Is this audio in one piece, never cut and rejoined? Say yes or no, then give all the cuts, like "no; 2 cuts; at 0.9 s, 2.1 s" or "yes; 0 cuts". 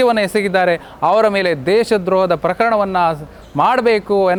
yes; 0 cuts